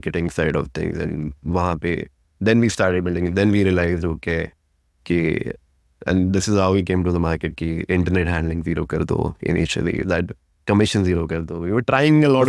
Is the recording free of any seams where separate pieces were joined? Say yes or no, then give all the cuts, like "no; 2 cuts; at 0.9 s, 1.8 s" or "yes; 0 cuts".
yes; 0 cuts